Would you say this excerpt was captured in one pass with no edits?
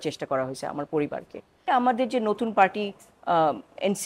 no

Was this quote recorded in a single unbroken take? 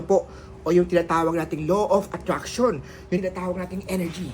no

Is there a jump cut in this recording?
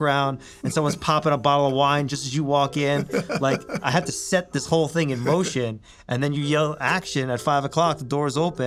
no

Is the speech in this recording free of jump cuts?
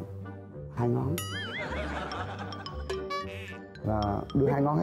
yes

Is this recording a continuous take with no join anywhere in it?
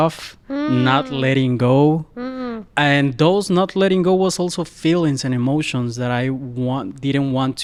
yes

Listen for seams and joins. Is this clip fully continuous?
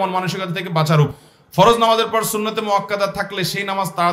no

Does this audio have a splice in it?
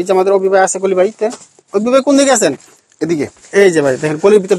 no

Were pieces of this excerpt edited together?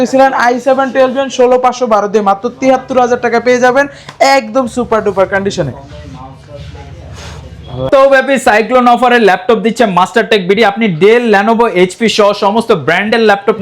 no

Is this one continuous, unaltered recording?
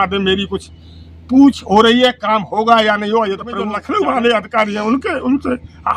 no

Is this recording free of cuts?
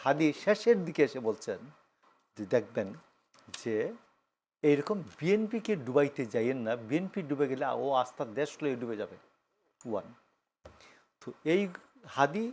yes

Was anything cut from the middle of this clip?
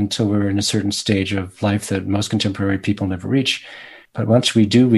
yes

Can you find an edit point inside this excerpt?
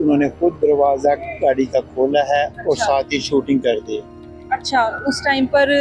no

